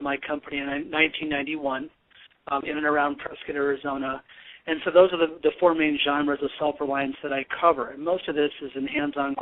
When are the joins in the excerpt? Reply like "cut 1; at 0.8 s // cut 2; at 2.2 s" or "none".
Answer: cut 1; at 2.6 s